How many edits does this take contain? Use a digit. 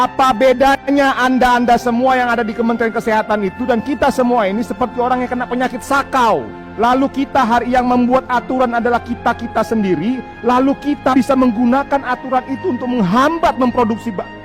1